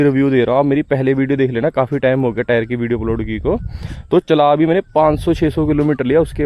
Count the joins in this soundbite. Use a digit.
0